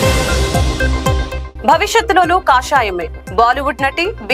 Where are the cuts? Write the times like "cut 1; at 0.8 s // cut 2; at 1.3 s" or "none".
none